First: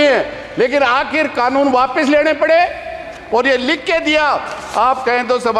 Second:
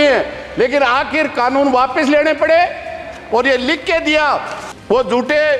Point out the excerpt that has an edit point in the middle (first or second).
second